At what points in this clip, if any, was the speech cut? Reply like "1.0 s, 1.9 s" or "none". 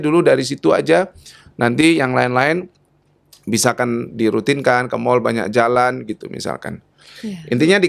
none